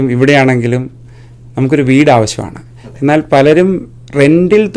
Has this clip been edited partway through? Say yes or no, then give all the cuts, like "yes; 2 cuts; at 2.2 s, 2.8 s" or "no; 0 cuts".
no; 0 cuts